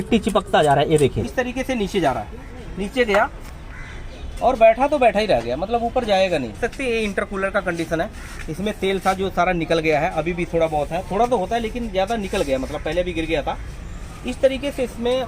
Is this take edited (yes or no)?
yes